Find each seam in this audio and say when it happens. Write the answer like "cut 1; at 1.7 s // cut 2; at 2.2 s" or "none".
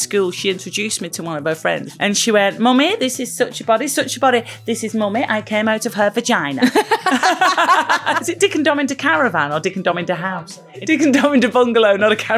cut 1; at 1.9 s // cut 2; at 8.3 s // cut 3; at 10.8 s